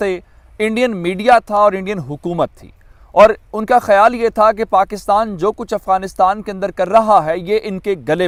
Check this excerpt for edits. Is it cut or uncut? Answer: uncut